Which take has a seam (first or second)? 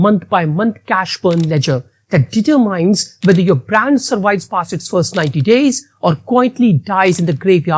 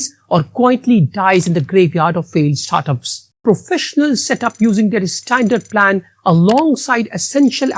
second